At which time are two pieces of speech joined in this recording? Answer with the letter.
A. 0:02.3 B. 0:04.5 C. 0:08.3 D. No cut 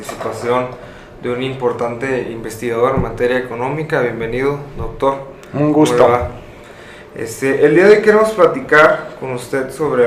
B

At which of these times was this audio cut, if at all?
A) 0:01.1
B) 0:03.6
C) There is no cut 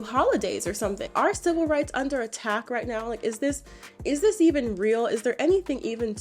A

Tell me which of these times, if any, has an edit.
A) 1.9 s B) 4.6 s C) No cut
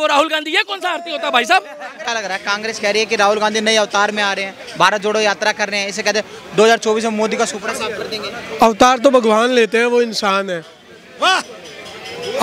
A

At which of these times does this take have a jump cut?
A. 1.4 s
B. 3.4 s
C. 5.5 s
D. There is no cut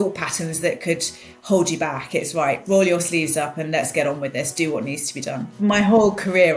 C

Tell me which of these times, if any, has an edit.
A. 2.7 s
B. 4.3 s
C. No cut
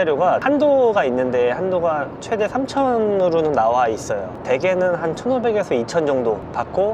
B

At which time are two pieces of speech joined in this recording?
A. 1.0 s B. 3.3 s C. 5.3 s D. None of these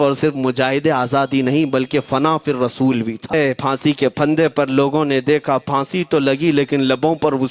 B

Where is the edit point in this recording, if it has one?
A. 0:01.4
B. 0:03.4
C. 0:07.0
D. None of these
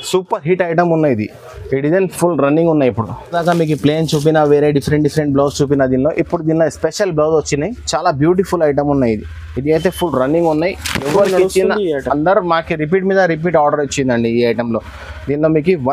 B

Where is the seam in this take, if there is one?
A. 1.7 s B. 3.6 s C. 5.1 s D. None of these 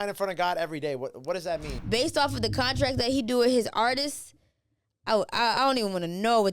A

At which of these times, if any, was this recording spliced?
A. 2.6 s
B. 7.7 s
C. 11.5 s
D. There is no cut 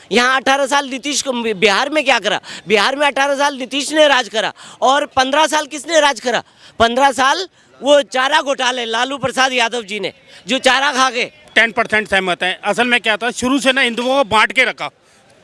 C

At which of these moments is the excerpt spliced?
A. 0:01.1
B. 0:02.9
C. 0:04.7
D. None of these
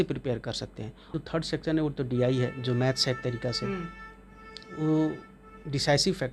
A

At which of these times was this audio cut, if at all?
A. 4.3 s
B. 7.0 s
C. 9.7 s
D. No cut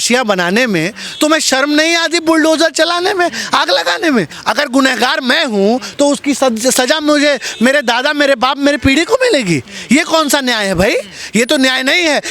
A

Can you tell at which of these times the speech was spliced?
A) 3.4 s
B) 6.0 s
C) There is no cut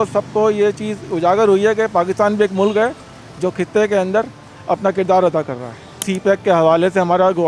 B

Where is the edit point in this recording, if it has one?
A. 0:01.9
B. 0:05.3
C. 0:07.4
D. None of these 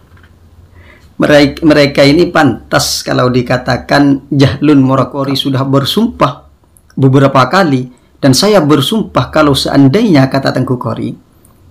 B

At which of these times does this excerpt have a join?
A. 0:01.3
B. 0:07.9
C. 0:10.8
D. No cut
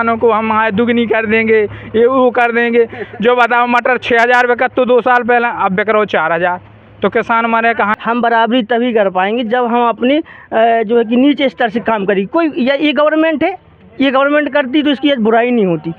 B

